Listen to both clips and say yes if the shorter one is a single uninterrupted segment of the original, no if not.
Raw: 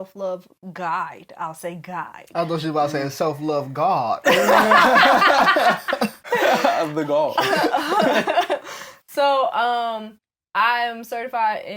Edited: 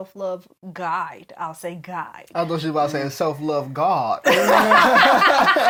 yes